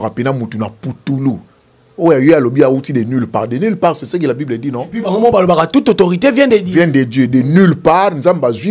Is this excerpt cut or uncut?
uncut